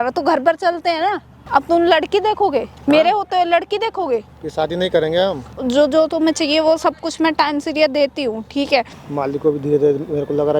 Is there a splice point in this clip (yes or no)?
yes